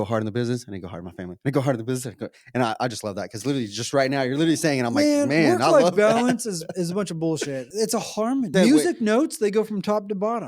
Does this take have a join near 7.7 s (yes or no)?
yes